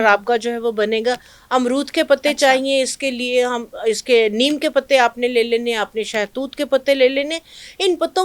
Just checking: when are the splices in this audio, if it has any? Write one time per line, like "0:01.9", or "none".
0:01.3